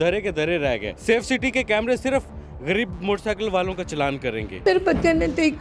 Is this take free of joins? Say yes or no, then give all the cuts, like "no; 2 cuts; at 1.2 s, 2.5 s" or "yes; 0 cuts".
no; 2 cuts; at 0.9 s, 4.5 s